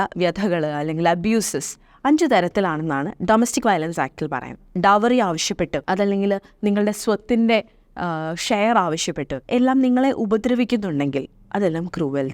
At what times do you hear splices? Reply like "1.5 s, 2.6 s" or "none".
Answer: 4.7 s, 5.8 s, 9.4 s